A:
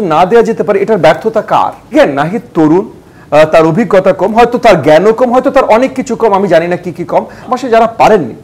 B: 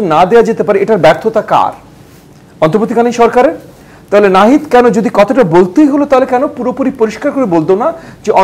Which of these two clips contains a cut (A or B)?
A